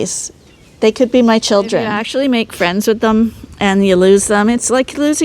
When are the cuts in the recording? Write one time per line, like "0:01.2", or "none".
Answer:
0:02.0